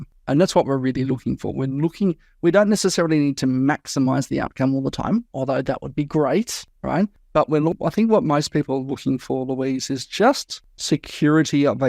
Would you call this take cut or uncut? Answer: uncut